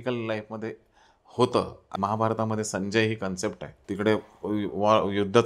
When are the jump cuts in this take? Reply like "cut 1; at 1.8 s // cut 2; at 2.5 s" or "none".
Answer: cut 1; at 1.9 s // cut 2; at 3.7 s